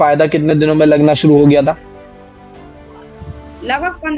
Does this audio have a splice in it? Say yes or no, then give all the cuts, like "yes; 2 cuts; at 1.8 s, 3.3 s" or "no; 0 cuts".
no; 0 cuts